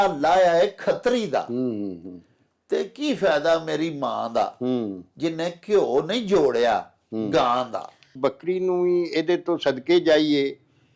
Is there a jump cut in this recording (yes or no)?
yes